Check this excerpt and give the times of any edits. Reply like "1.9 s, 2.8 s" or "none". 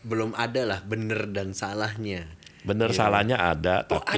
none

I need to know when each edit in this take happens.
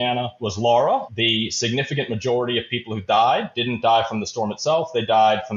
1.1 s

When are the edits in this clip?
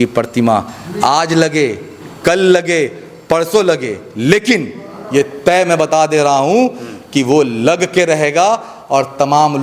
none

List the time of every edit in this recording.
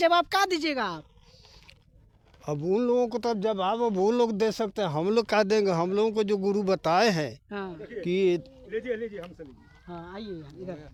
none

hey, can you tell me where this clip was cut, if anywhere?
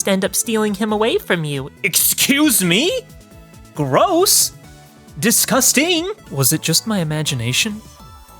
6.2 s

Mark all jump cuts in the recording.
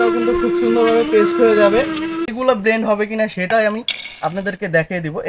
2.3 s

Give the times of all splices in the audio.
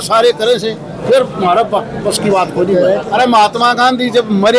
3.1 s

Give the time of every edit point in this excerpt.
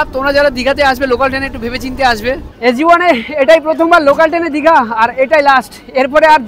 2.5 s

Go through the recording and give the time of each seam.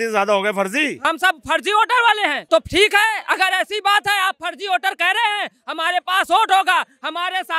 1.0 s, 2.4 s

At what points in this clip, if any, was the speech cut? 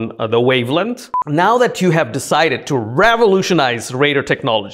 1.2 s

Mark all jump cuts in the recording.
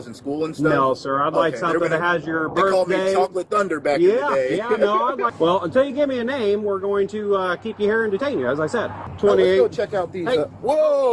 5.3 s, 9.0 s

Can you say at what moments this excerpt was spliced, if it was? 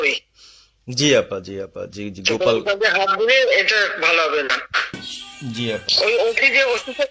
5.2 s

